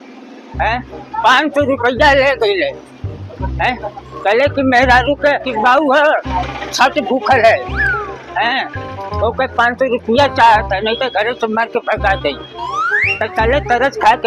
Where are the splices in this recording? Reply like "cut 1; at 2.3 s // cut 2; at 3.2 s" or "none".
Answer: none